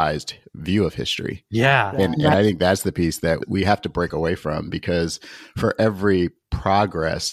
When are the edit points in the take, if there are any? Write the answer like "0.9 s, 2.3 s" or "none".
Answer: none